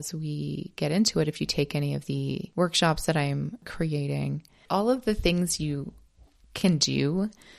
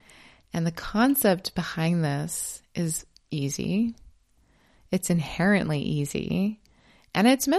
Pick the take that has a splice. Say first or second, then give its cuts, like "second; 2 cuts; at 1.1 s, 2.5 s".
first; 3 cuts; at 2.4 s, 3.7 s, 4.6 s